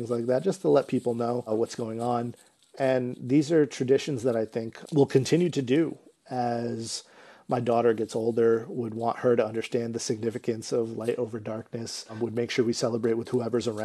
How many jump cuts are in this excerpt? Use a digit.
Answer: 0